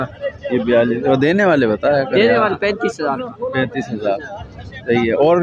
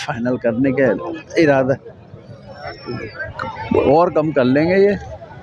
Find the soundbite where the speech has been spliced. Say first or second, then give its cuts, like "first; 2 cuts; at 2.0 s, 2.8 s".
second; 1 cut; at 2.8 s